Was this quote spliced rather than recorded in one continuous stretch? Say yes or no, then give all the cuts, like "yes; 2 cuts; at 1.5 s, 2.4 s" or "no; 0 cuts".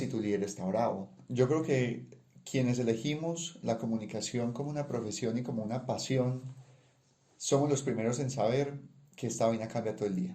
yes; 1 cut; at 1.1 s